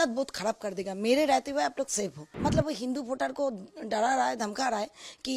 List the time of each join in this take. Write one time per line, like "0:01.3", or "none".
0:02.2